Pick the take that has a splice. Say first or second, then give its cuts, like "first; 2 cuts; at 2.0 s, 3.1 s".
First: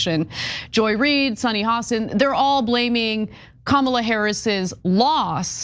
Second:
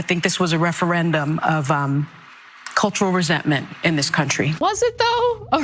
second; 1 cut; at 4.6 s